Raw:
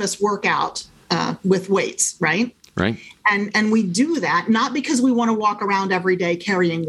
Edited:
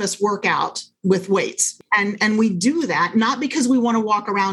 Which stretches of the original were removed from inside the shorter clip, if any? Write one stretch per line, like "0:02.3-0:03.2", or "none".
0:00.9-0:01.3
0:02.1-0:03.0